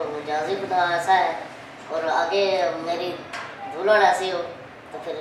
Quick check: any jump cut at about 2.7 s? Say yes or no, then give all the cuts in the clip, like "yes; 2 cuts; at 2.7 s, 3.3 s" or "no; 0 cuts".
no; 0 cuts